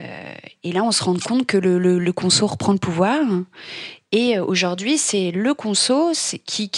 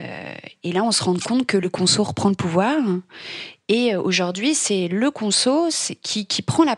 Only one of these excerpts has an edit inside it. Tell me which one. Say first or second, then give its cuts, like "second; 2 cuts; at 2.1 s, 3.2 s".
second; 1 cut; at 1.6 s